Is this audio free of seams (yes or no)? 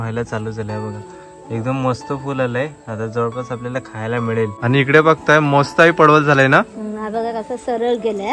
no